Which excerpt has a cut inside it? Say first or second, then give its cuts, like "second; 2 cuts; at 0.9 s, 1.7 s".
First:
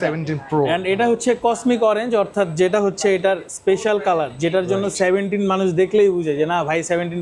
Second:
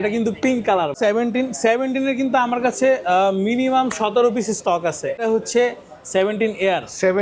second; 2 cuts; at 0.9 s, 5.2 s